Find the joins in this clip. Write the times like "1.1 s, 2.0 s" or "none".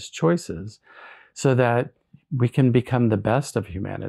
none